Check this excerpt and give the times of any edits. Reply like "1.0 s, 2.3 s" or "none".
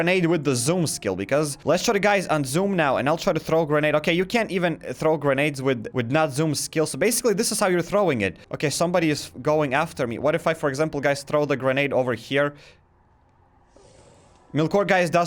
1.6 s, 8.4 s, 14.4 s